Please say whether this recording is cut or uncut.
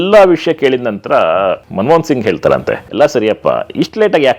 cut